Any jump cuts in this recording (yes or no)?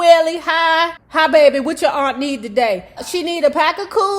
yes